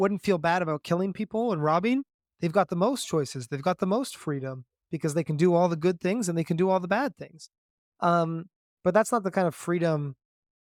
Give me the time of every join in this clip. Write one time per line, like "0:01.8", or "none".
none